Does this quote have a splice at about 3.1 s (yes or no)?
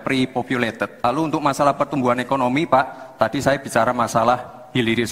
no